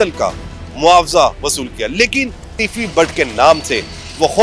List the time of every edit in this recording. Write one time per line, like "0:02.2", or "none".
0:02.6